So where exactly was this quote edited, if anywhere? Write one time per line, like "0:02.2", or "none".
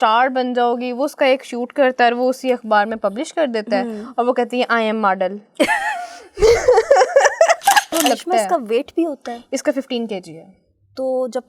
0:07.9